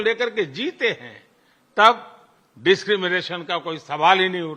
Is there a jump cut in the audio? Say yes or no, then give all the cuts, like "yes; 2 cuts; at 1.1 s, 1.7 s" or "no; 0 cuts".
no; 0 cuts